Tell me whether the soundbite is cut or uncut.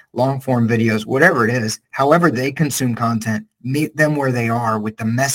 uncut